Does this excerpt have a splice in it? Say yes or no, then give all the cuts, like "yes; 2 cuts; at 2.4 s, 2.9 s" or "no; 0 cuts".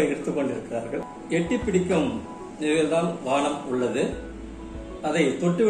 yes; 1 cut; at 1.1 s